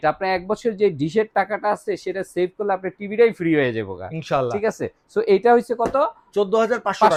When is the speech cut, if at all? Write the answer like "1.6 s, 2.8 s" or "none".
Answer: none